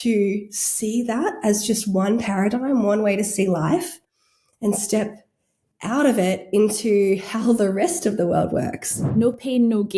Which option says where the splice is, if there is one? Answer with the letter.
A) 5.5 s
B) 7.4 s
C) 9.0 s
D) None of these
C